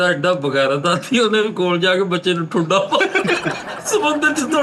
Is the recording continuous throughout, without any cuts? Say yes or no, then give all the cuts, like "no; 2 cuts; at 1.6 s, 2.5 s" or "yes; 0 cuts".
yes; 0 cuts